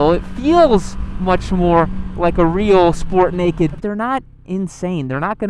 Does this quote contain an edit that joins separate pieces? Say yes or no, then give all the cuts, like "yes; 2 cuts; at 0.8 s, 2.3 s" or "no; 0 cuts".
yes; 1 cut; at 3.8 s